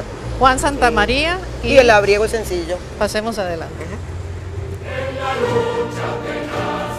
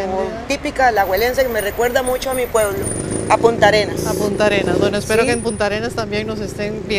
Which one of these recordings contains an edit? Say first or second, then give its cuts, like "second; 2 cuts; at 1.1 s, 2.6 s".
first; 1 cut; at 1.3 s